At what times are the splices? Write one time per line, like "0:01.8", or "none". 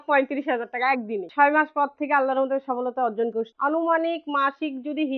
0:01.3
0:03.5